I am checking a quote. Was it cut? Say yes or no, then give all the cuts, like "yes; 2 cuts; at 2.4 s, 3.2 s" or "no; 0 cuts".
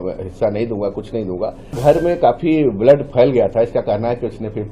yes; 1 cut; at 1.8 s